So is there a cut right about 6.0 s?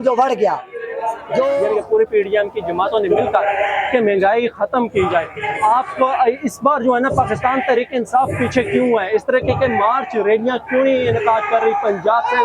no; 1 cut; at 1.6 s

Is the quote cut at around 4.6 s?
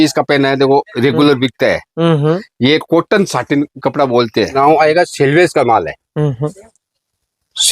yes; 1 cut; at 4.6 s

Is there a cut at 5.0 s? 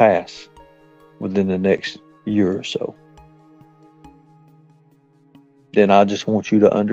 yes; 2 cuts; at 3.3 s, 5.0 s

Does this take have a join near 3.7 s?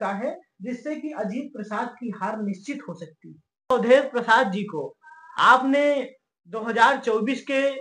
yes; 1 cut; at 3.7 s

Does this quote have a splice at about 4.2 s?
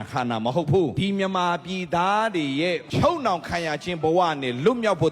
no; 2 cuts; at 0.9 s, 2.9 s

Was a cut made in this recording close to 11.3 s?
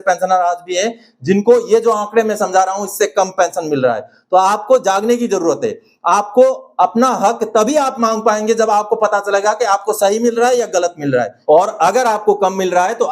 yes; 1 cut; at 11.3 s

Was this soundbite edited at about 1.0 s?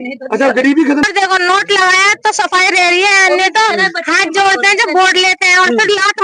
yes; 1 cut; at 1.0 s

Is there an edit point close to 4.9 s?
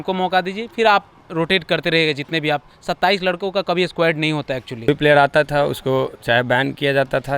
yes; 1 cut; at 4.9 s

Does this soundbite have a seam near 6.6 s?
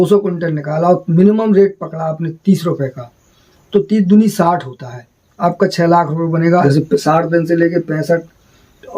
yes; 1 cut; at 6.6 s

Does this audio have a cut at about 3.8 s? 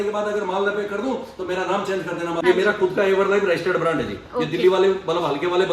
no; 1 cut; at 2.4 s

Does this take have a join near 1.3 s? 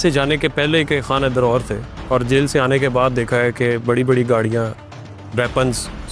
no; 0 cuts

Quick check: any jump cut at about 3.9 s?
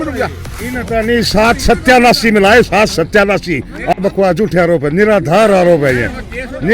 yes; 1 cut; at 3.9 s

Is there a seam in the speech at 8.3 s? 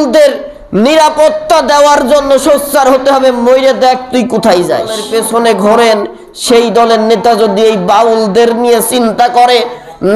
no; 1 cut; at 5.0 s

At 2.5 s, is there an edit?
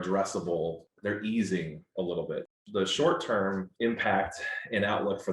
yes; 3 cuts; at 0.9 s, 2.5 s, 3.7 s

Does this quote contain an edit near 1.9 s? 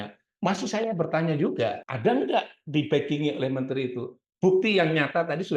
yes; 1 cut; at 1.9 s

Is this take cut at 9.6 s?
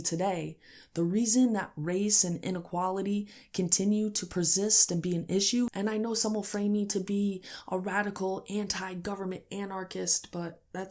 no; 1 cut; at 5.7 s

